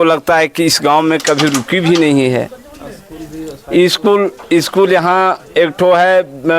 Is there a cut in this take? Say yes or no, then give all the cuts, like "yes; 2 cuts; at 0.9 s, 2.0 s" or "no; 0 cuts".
no; 0 cuts